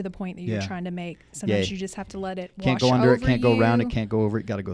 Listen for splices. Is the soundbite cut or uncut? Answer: uncut